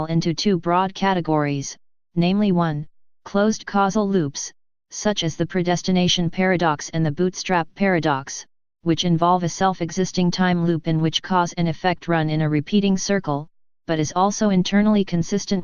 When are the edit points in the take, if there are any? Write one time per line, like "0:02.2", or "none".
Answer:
0:05.2